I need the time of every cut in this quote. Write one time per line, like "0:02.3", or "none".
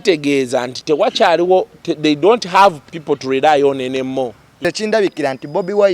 0:04.6